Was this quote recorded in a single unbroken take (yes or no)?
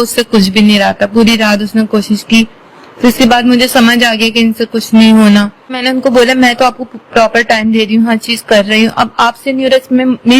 no